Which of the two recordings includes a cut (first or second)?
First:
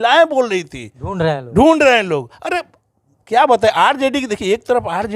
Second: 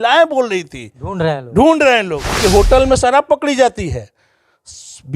second